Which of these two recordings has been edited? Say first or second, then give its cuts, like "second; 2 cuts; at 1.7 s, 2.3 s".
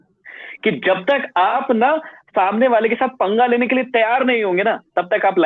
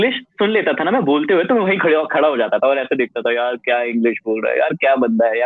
first; 1 cut; at 1.5 s